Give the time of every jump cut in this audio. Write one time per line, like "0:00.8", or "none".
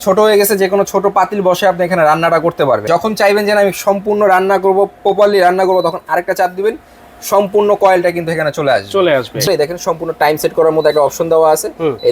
0:02.8
0:09.5